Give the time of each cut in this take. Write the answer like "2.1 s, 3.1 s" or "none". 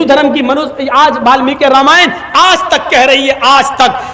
none

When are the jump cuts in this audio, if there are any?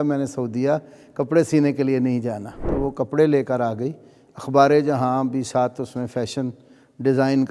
2.7 s

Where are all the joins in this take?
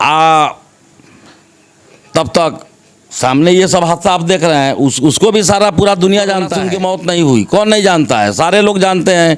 6.6 s

